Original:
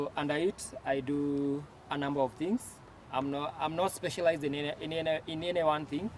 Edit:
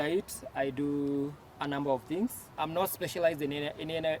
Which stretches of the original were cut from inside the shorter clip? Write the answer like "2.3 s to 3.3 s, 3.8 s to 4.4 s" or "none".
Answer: 2.8 s to 3.5 s